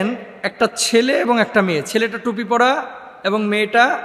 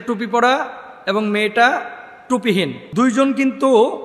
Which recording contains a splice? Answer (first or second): second